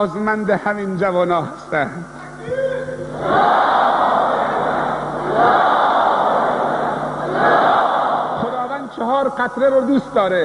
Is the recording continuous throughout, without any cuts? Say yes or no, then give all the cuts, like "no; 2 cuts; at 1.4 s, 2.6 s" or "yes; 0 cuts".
no; 1 cut; at 8.7 s